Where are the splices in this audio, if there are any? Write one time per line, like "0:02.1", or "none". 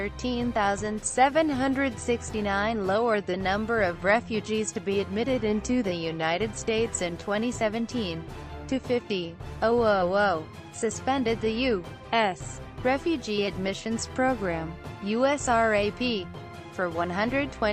0:01.3